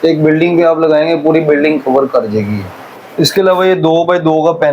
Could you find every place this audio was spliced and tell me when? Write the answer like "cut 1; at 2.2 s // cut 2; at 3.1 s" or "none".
cut 1; at 3.1 s